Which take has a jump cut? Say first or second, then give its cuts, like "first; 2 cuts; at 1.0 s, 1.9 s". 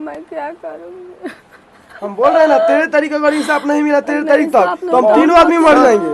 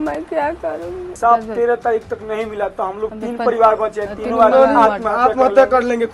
second; 1 cut; at 1.1 s